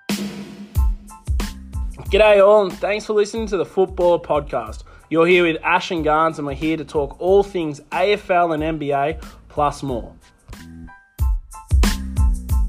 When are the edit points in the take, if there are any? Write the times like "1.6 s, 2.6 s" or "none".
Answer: none